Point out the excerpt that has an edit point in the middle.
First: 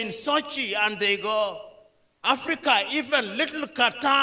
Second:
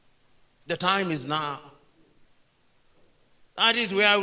second; 1 cut; at 2.2 s

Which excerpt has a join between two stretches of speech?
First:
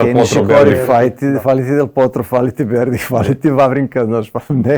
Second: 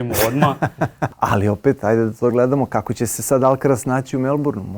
second; 1 cut; at 1.1 s

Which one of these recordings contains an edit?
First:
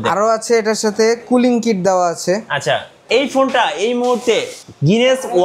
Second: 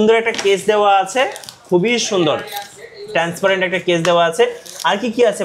first; 1 cut; at 3.0 s

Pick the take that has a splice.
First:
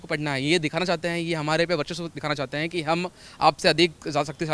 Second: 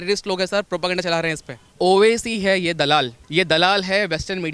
second; 2 cuts; at 1.7 s, 3.2 s

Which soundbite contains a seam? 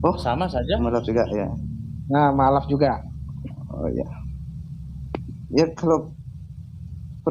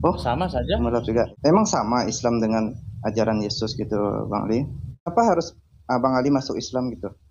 second; 2 cuts; at 1.3 s, 5.1 s

